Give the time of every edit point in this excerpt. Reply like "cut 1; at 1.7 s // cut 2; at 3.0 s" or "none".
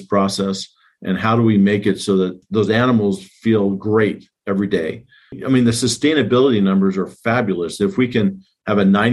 cut 1; at 2.4 s // cut 2; at 5.4 s